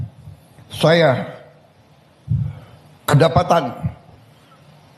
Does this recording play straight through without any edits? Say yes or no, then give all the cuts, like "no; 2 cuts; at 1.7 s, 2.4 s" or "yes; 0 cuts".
yes; 0 cuts